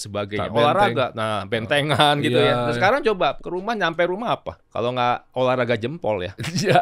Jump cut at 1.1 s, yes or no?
no